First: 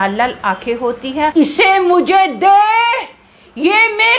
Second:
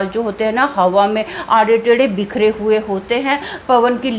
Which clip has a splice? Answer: first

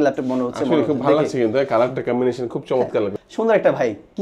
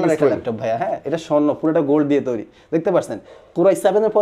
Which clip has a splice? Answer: first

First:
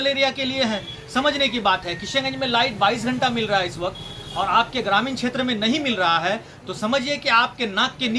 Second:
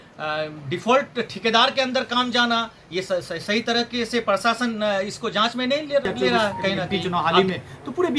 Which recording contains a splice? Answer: second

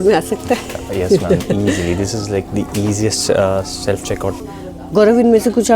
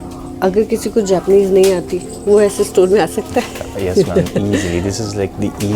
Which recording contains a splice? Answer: first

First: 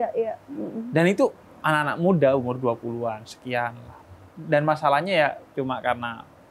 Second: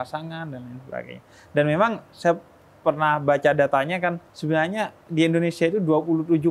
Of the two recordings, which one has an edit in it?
second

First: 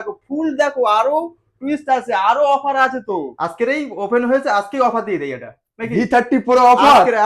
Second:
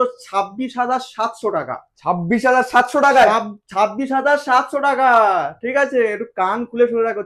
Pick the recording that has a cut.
first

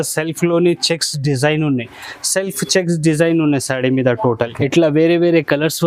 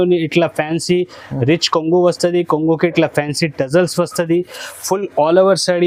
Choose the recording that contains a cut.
first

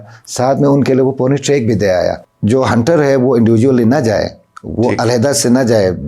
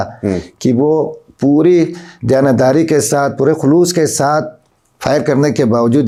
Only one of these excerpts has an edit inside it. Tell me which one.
first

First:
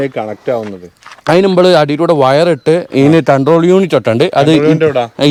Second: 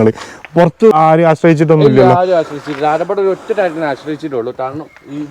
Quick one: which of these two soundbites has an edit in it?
second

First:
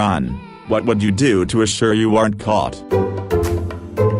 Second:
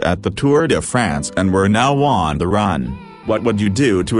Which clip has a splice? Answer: first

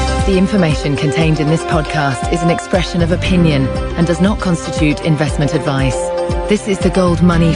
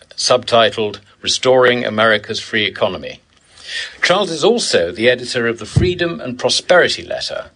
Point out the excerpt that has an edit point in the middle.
second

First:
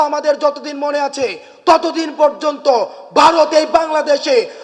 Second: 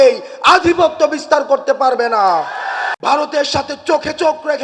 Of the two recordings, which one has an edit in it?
second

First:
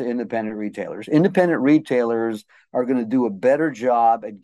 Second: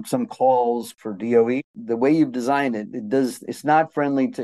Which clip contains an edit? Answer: second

